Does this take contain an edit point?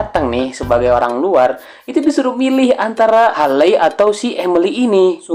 no; 0 cuts

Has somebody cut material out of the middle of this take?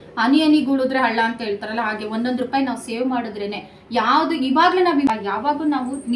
yes; 1 cut; at 5.1 s

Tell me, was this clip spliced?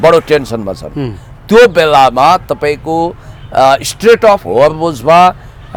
no; 0 cuts

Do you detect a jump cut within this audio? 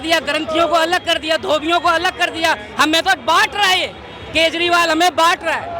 no; 0 cuts

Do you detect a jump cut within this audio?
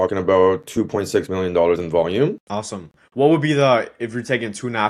no; 0 cuts

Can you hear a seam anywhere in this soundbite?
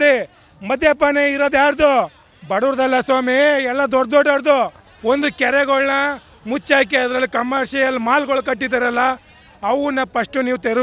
yes; 1 cut; at 4.9 s

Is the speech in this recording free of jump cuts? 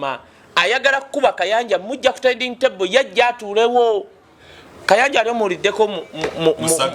yes; 0 cuts

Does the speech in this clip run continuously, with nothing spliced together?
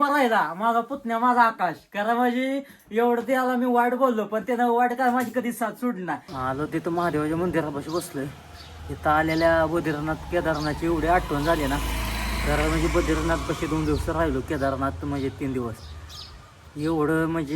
no; 1 cut; at 6.4 s

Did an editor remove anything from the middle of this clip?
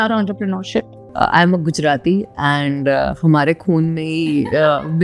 yes; 1 cut; at 1.0 s

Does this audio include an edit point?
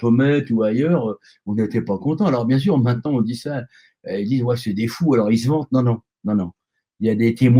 no; 0 cuts

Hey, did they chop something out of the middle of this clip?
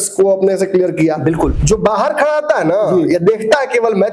yes; 1 cut; at 1.6 s

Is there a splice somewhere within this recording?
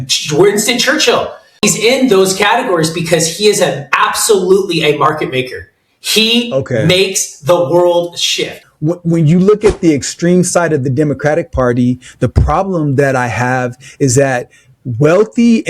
yes; 2 cuts; at 1.6 s, 8.6 s

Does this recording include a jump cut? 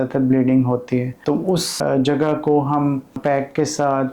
yes; 2 cuts; at 1.7 s, 3.2 s

